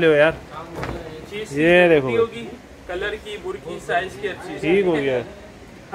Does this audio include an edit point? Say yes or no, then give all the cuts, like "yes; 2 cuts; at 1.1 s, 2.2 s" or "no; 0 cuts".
no; 0 cuts